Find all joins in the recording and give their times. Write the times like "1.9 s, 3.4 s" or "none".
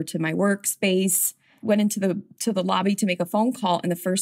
1.5 s